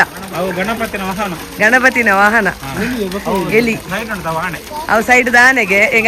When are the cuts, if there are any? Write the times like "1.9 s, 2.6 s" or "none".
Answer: none